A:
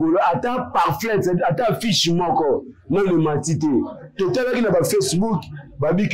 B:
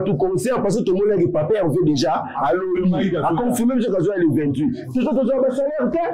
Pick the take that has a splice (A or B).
B